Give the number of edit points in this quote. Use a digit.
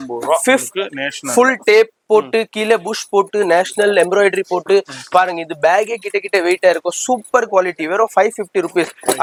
0